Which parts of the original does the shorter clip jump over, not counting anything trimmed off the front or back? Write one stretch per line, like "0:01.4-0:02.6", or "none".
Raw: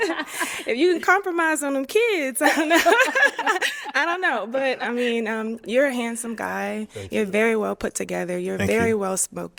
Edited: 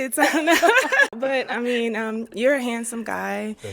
0:03.4-0:04.5